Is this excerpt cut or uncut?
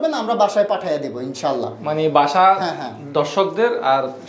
uncut